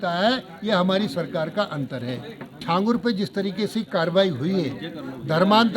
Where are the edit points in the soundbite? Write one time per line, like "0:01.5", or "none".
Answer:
0:02.6